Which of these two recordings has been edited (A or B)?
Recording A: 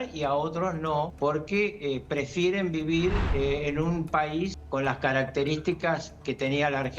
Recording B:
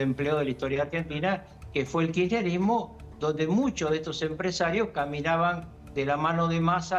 A